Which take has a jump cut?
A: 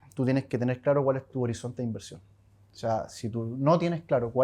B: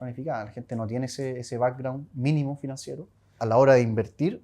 B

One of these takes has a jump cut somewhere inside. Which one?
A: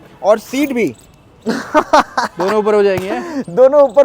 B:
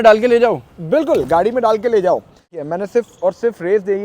B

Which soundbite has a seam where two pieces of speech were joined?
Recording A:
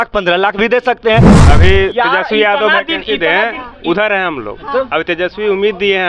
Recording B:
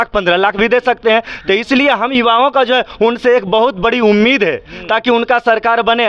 A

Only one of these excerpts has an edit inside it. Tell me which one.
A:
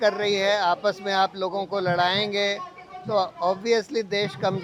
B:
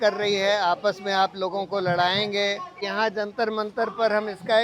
B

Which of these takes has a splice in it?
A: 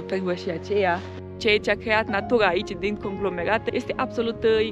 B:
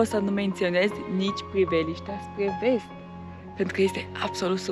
A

